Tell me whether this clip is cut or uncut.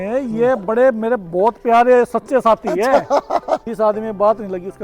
cut